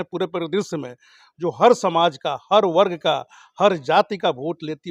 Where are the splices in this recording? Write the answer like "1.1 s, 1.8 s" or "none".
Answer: none